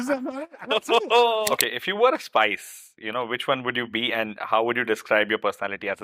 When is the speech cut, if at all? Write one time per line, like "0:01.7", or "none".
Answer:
0:01.5

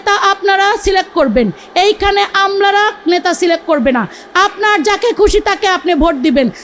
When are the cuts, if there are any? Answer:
none

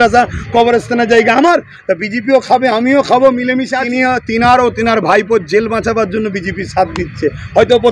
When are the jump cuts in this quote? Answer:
0:03.8

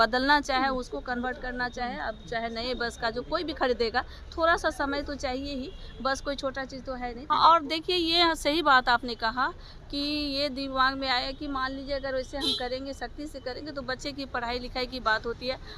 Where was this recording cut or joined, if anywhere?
0:07.2

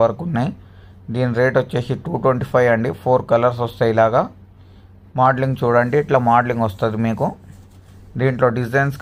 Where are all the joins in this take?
none

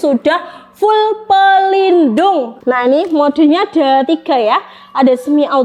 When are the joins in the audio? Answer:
0:02.5

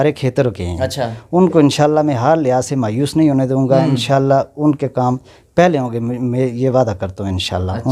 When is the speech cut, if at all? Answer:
none

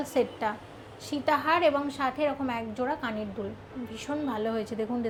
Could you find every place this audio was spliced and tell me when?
none

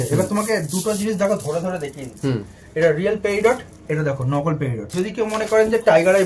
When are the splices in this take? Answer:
0:04.9

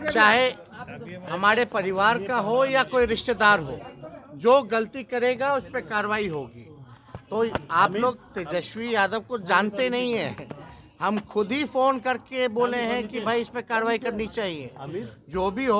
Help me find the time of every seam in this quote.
none

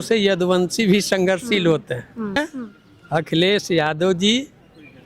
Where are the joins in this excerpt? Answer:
0:02.4

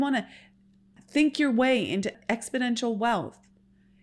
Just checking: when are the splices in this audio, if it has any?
0:01.0
0:02.1

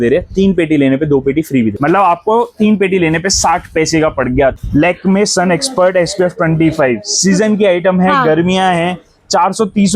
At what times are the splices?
0:01.8
0:04.6

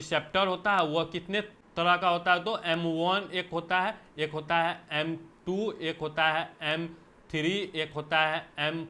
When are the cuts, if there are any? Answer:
0:01.6

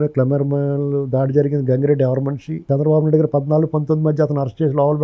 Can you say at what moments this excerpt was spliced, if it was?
0:02.6

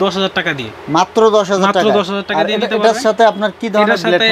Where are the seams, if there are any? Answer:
none

